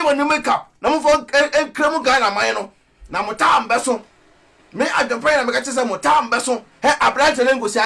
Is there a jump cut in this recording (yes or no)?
no